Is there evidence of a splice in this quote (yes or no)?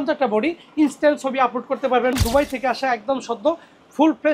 yes